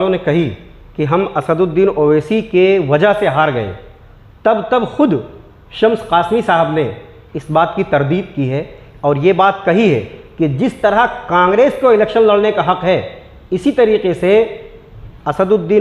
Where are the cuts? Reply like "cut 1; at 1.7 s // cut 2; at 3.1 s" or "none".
none